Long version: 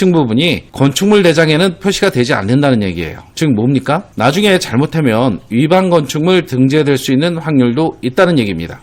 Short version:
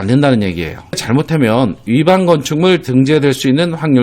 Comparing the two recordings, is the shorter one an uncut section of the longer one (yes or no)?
no